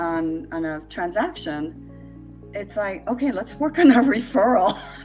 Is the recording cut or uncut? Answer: uncut